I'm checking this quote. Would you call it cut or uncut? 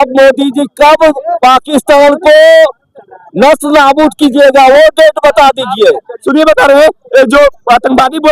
cut